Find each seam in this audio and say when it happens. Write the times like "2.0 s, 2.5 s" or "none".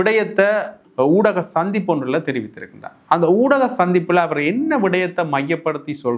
none